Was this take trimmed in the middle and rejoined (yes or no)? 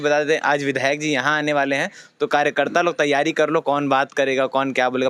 no